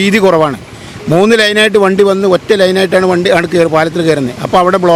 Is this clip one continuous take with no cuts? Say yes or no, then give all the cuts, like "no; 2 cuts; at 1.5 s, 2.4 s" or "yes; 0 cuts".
yes; 0 cuts